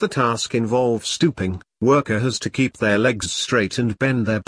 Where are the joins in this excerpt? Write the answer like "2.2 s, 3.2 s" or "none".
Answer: 1.0 s

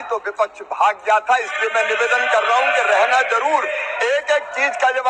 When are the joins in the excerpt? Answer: none

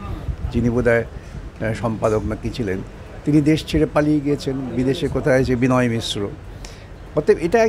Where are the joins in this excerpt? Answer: none

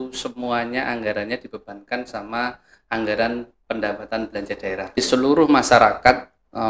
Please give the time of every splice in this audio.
5.0 s

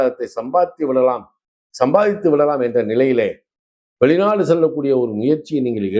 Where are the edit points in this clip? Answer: none

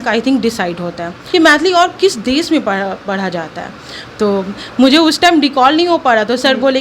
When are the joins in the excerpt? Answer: 1.1 s

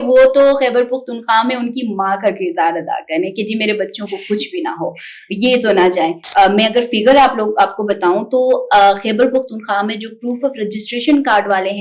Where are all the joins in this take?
6.2 s

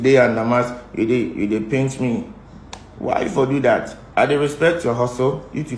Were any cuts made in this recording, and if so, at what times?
4.0 s

